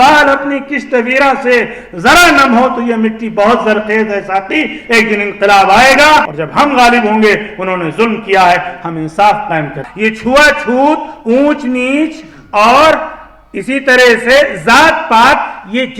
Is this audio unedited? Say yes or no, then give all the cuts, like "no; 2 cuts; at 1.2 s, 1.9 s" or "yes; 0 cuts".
no; 2 cuts; at 6.4 s, 9.8 s